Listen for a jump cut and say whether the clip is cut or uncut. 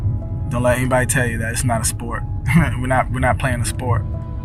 uncut